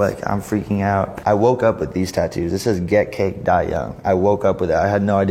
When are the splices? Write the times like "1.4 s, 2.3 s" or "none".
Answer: 1.1 s